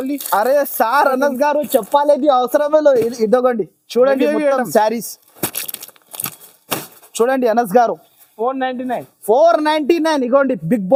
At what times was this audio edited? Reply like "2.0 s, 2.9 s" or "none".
none